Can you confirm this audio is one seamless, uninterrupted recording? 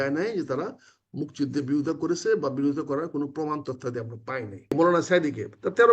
no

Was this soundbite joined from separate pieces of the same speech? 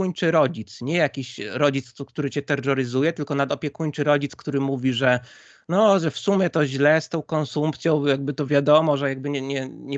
no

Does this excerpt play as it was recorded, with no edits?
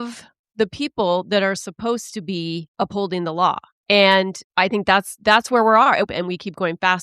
no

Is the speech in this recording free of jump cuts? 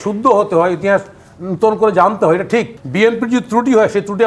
no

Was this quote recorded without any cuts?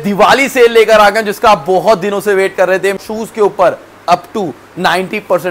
no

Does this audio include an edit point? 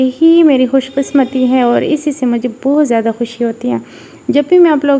no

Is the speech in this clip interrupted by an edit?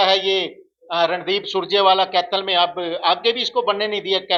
no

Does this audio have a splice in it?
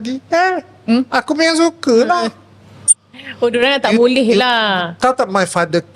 no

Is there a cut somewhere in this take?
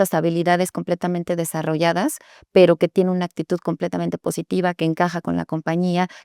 no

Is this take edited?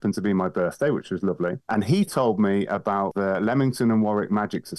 yes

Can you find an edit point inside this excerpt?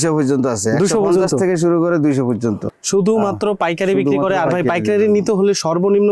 yes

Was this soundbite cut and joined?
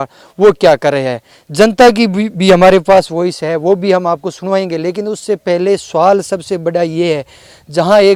no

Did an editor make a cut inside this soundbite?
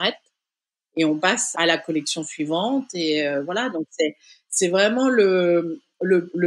yes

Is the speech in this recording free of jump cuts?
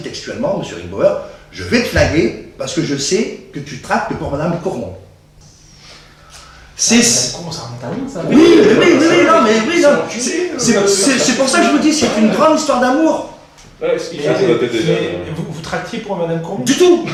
yes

